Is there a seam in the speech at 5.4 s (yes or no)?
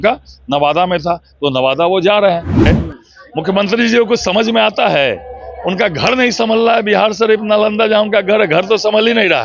no